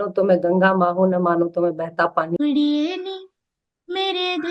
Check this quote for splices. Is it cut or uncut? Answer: cut